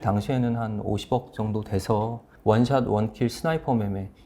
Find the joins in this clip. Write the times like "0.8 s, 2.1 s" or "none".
2.2 s